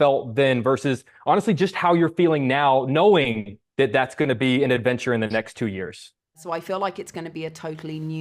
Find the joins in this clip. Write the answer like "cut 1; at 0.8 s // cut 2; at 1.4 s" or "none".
cut 1; at 6.4 s